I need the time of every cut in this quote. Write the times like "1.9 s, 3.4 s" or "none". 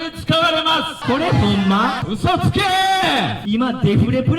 1.0 s, 2.0 s, 3.4 s